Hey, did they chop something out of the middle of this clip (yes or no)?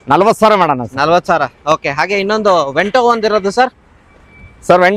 no